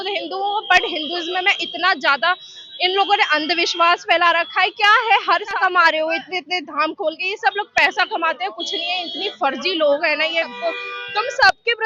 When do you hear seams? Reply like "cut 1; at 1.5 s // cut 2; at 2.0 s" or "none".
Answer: cut 1; at 5.6 s // cut 2; at 10.5 s